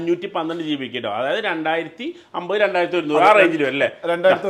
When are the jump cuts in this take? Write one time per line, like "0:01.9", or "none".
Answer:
none